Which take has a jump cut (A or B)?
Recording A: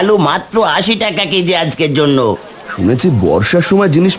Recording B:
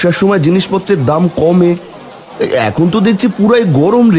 A